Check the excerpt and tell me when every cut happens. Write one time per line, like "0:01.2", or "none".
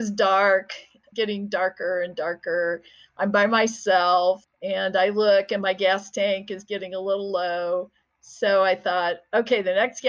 none